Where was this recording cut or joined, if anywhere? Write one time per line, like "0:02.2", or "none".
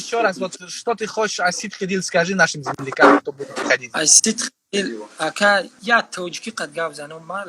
0:05.7

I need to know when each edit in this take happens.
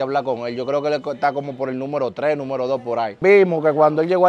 0:03.1

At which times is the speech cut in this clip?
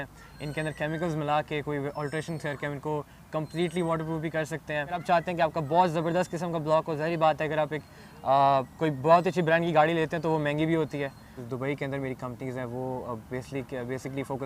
0:05.0
0:11.4

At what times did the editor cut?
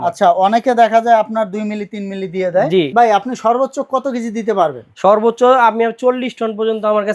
0:02.9

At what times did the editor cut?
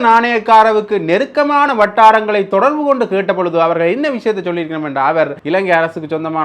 0:05.4

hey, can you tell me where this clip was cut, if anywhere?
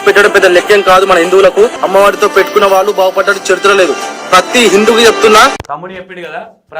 0:01.8
0:05.6

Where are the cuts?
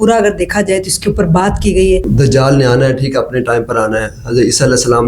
0:02.1

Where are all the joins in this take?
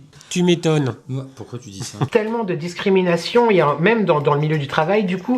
0:02.1

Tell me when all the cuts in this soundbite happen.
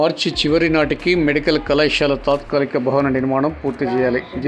none

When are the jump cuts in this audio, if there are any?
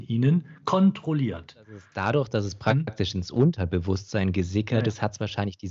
0:01.9

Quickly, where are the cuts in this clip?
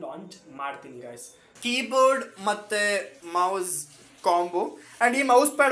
0:01.4

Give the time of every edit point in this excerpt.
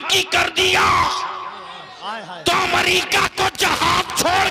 none

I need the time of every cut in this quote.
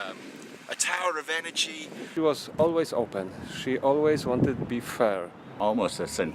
0:02.1
0:05.4

